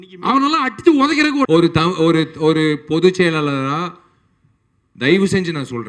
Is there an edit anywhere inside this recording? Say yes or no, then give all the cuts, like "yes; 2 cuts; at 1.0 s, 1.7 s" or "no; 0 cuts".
yes; 1 cut; at 1.5 s